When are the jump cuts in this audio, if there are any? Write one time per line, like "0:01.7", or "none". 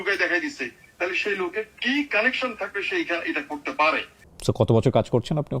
0:04.1